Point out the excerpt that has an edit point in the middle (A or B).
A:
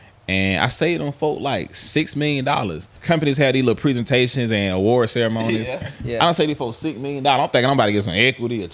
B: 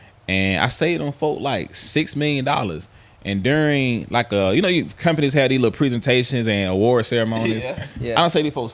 A